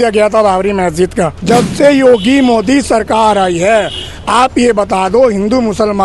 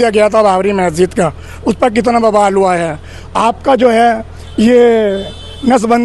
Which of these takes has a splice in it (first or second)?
first